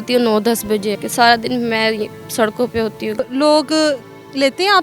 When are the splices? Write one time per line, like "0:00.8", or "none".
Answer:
0:01.0
0:03.2